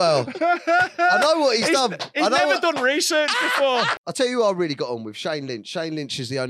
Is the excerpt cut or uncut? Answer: cut